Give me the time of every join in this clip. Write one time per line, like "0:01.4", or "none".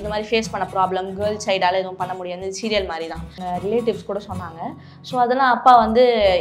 0:03.4